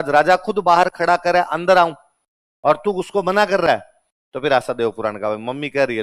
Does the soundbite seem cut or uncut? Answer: uncut